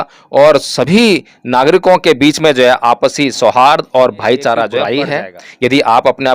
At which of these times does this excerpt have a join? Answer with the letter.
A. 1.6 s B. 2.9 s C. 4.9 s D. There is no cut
C